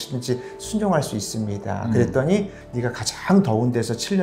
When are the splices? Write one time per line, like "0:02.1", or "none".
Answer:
0:02.6